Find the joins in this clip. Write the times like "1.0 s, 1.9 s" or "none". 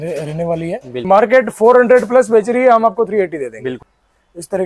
1.0 s, 3.8 s